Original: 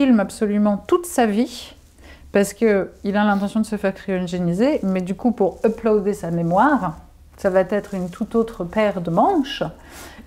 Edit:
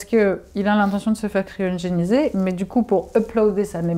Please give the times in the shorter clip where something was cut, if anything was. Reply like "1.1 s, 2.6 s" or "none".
none

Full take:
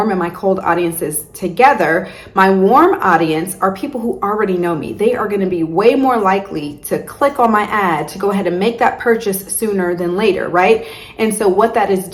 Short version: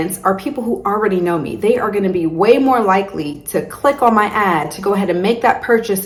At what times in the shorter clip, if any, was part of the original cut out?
none

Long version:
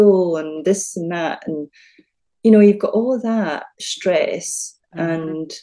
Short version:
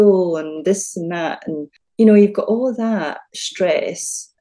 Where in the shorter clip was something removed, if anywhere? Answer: 1.8 s

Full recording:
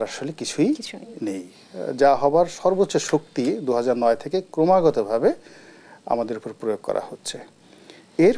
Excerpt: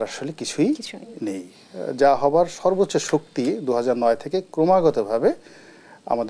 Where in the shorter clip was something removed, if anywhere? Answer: none

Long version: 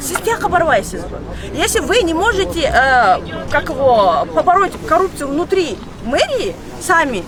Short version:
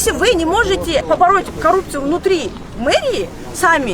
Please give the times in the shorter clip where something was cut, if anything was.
1.0 s

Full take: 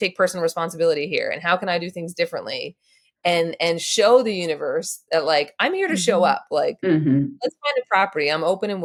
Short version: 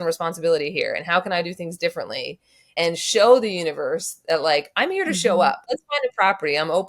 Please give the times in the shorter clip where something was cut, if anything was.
2.7 s, 5.6 s

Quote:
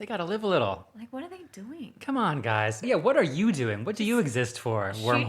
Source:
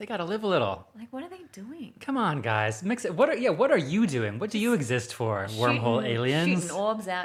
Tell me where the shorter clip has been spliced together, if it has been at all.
2.8 s

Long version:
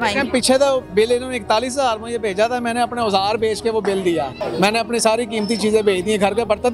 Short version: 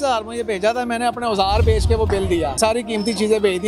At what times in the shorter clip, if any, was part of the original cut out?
2.6 s

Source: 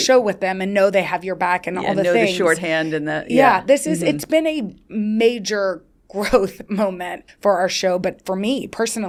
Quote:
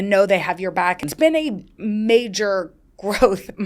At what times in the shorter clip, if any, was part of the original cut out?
1.1 s

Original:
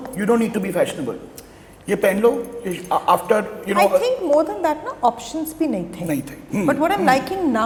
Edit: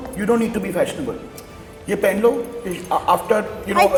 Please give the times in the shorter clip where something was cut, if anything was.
none

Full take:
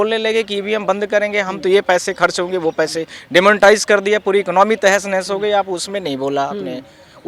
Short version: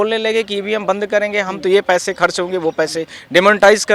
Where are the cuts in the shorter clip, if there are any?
none

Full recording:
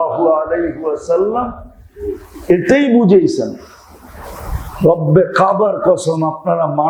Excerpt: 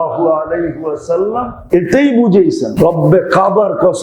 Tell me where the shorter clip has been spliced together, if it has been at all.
1.6 s, 2.7 s

